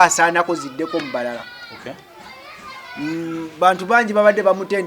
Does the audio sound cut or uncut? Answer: uncut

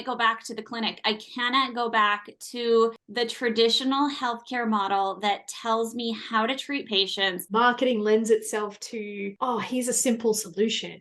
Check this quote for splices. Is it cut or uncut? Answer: cut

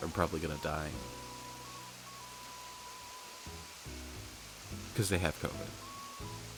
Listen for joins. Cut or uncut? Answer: uncut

